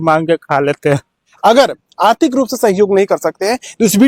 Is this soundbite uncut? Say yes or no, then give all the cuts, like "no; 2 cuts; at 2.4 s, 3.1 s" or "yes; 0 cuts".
no; 1 cut; at 1.2 s